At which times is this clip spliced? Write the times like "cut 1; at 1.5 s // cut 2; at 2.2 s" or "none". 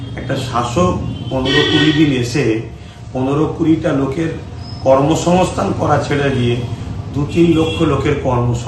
none